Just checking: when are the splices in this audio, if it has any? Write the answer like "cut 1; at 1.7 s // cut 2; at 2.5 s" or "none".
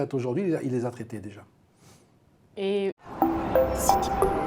none